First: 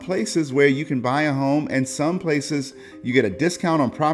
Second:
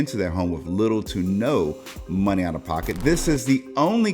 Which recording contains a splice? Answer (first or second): second